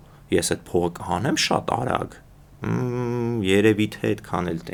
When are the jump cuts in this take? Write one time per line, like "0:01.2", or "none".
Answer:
none